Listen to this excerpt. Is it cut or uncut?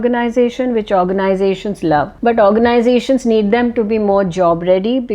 cut